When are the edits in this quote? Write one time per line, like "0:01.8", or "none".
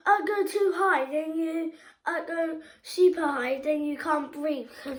none